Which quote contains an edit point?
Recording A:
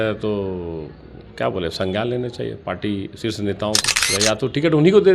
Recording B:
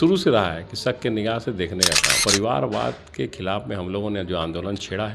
B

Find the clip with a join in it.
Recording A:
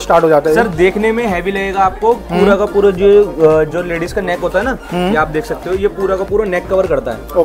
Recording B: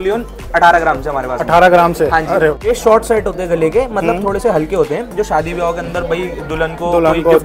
B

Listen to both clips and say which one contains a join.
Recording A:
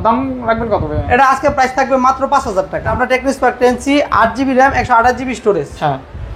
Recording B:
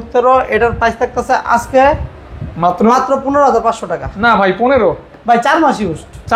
A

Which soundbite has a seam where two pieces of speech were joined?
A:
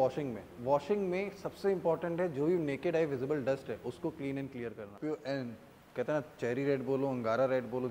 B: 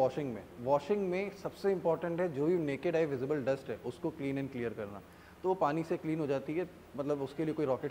A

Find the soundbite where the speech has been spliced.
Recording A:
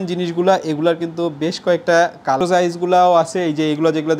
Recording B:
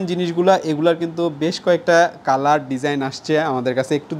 A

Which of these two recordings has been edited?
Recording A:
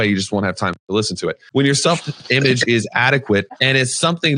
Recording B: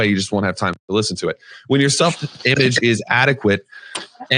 A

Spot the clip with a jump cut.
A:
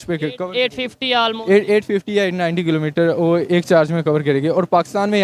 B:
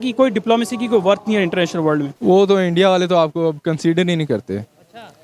B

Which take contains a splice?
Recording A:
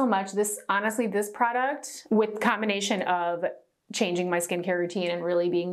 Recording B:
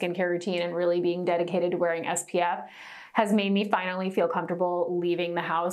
A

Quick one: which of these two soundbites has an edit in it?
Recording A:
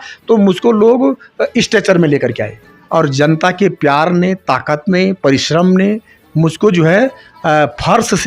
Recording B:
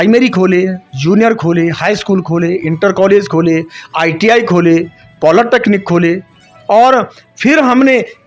A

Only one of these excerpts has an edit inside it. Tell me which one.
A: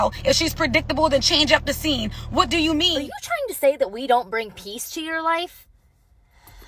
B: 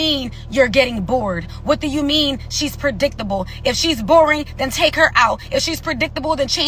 A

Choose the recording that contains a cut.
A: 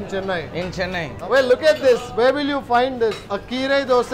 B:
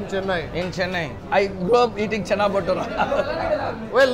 A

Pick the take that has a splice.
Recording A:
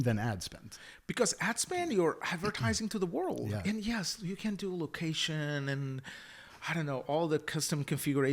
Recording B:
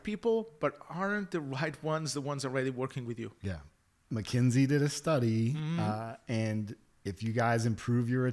B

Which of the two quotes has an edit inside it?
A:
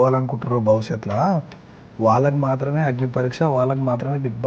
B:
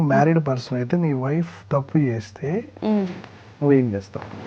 B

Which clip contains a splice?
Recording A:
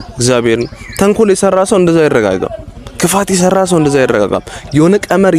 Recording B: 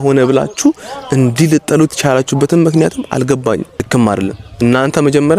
B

